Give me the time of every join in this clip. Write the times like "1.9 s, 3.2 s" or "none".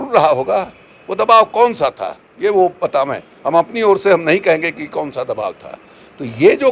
none

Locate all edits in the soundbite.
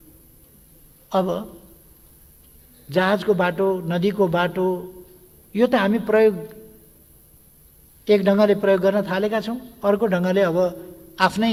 none

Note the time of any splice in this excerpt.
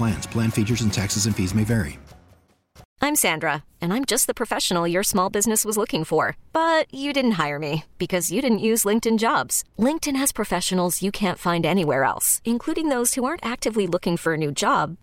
2.8 s

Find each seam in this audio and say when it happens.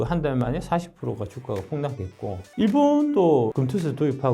3.2 s

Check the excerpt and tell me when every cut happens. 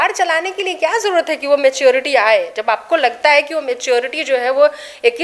none

